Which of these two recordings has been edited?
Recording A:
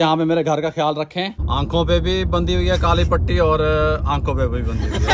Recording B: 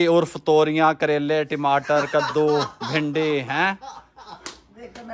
A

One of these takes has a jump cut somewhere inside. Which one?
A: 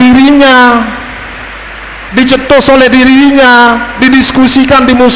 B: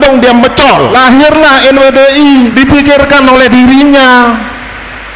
B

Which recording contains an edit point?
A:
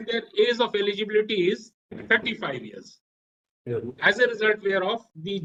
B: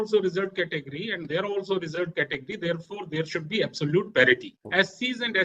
B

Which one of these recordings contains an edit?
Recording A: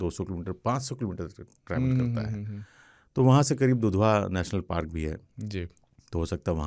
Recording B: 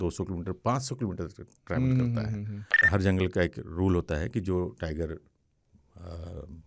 B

